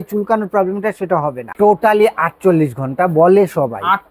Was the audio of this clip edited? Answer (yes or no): yes